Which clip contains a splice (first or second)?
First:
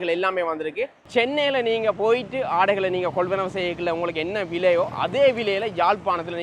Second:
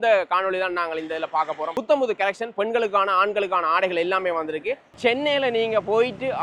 second